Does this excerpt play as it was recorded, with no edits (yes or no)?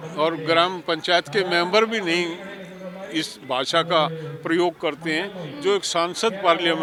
yes